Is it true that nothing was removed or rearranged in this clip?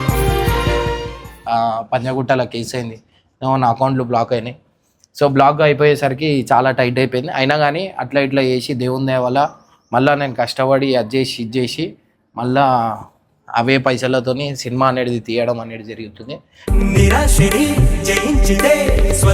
no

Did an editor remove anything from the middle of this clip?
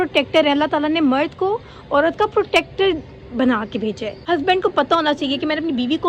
yes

